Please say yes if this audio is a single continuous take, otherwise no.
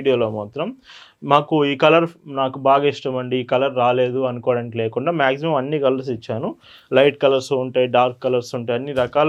yes